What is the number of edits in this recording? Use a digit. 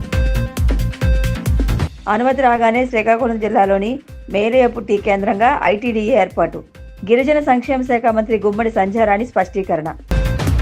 1